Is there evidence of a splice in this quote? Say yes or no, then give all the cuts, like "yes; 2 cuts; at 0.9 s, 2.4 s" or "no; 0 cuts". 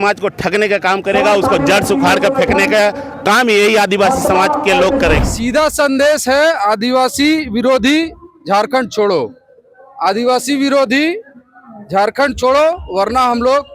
yes; 1 cut; at 5.2 s